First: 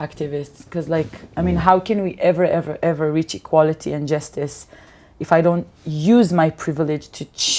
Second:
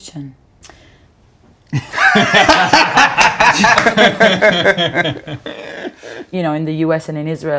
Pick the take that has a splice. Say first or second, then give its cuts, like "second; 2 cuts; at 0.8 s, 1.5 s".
second; 1 cut; at 6.3 s